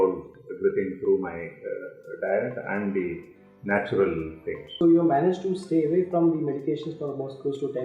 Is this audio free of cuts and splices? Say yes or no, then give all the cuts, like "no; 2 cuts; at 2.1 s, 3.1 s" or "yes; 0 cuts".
no; 1 cut; at 4.7 s